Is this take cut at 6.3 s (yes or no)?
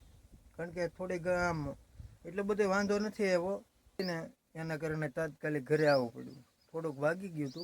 no